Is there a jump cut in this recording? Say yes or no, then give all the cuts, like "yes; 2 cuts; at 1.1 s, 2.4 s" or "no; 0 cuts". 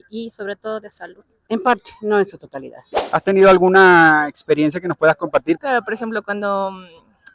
yes; 3 cuts; at 1.4 s, 3.0 s, 5.6 s